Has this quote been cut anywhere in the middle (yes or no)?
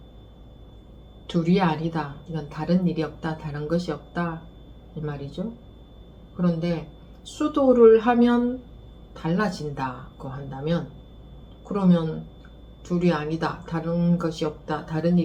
no